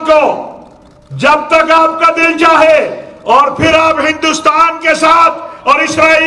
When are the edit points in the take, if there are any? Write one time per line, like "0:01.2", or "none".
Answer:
none